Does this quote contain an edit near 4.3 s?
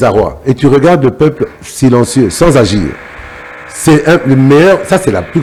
no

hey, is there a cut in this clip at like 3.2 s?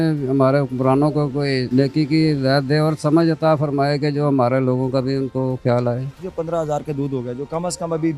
no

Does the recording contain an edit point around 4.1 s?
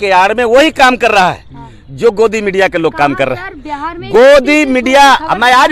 no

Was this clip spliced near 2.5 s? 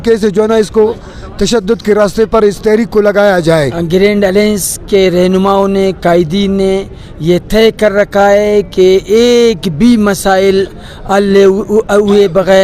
no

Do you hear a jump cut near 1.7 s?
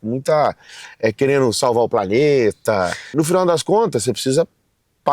no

